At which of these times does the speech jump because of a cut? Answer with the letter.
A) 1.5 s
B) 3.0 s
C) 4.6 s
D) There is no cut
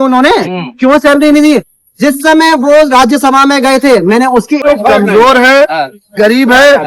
C